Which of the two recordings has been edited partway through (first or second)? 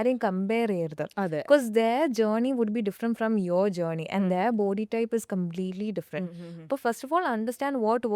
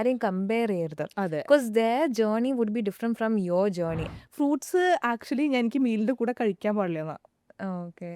second